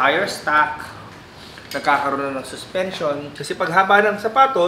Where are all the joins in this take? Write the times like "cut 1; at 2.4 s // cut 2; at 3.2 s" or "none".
cut 1; at 3.3 s